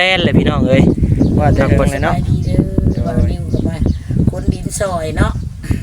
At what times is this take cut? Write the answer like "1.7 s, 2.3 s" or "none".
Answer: 1.4 s